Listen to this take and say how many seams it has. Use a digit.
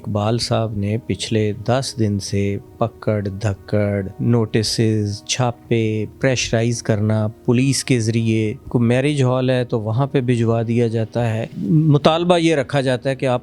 5